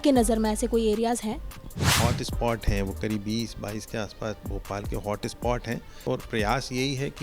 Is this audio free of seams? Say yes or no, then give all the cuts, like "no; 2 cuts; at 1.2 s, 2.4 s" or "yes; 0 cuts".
no; 2 cuts; at 1.9 s, 6.0 s